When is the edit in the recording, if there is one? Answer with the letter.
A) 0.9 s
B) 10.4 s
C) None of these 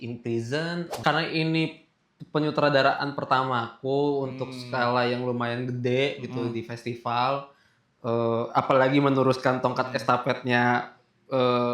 A